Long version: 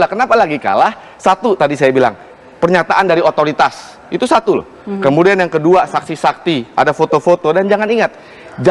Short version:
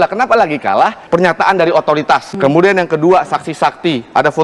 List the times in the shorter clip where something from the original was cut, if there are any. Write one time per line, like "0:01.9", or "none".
0:01.0
0:02.3